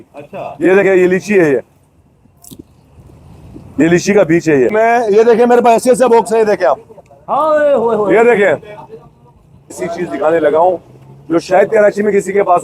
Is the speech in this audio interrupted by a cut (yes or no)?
yes